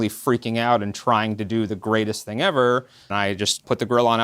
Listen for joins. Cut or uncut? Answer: cut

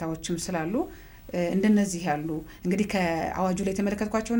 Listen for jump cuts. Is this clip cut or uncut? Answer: uncut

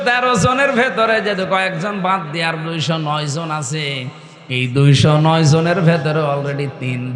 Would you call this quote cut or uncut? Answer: uncut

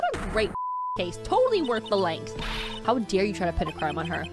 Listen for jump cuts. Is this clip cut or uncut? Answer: cut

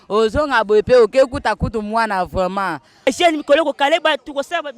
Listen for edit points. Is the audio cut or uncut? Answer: cut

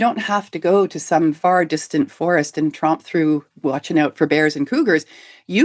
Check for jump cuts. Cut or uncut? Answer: cut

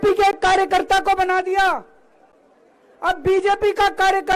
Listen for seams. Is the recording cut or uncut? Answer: uncut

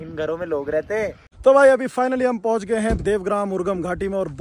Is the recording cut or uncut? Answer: cut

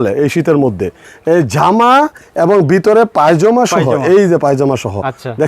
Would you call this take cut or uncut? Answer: cut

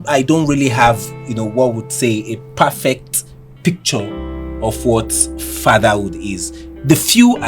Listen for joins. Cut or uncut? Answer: uncut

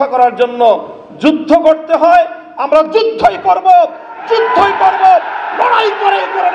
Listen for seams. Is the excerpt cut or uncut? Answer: uncut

